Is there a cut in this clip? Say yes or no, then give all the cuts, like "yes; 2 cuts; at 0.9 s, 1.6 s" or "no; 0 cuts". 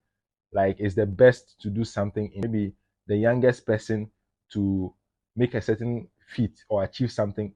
no; 0 cuts